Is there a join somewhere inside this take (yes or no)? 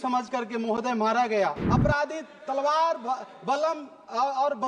yes